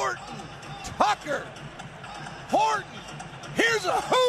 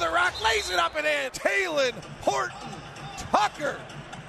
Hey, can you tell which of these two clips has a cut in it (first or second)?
second